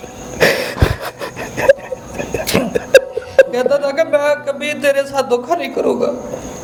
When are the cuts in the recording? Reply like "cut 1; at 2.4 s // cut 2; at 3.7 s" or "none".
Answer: none